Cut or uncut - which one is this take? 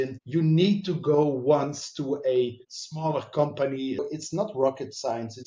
cut